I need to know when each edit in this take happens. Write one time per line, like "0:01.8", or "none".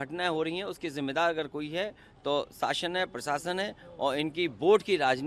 none